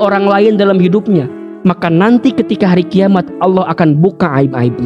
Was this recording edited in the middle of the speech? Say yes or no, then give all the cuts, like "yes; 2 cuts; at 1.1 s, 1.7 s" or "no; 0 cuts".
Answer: no; 0 cuts